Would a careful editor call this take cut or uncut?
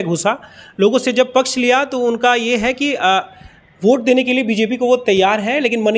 uncut